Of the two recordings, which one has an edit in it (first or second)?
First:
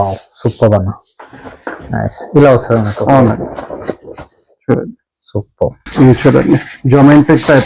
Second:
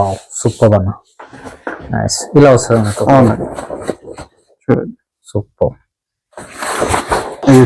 first